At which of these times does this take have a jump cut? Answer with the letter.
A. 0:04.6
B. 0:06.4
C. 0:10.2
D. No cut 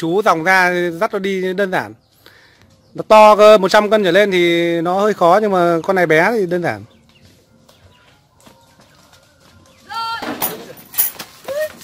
C